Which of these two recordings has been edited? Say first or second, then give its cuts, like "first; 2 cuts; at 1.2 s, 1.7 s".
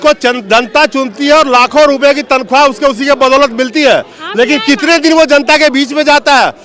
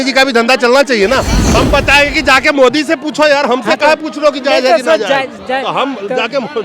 second; 1 cut; at 1.6 s